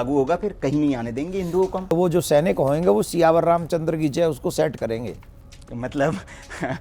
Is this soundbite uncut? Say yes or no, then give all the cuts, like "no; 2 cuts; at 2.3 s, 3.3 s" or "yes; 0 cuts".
no; 1 cut; at 1.9 s